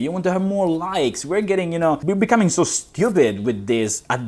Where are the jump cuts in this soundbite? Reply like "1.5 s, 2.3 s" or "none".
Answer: 2.0 s